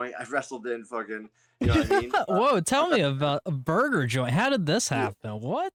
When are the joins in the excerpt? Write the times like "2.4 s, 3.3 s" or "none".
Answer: none